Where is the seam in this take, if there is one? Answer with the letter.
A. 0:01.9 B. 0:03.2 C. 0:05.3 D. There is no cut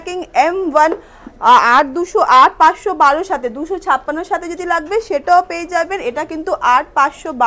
D